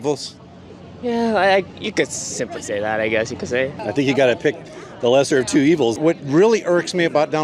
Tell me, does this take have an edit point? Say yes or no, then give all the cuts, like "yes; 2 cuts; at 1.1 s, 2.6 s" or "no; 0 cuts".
yes; 2 cuts; at 3.8 s, 6.0 s